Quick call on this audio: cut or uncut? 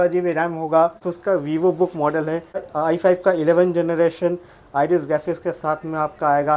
cut